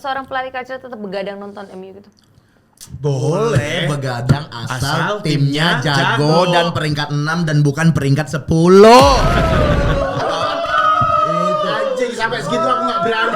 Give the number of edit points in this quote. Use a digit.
0